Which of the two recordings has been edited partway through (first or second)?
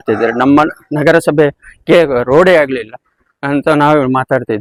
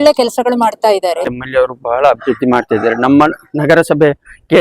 second